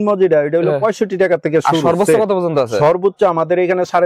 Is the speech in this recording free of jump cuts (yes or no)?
yes